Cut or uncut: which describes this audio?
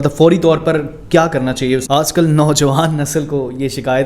cut